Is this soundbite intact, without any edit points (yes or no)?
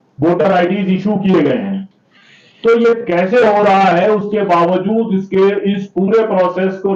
yes